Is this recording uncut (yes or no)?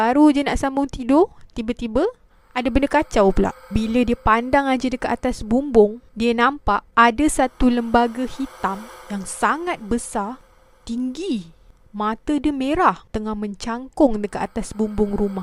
yes